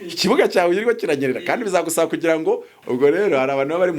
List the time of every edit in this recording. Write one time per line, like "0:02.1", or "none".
0:02.7